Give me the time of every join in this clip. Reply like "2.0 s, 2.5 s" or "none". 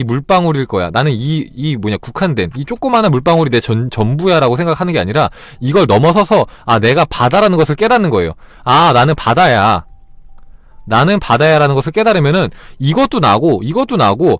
none